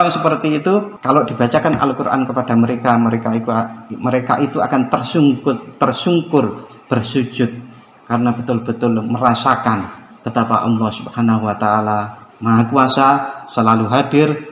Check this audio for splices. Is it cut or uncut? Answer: cut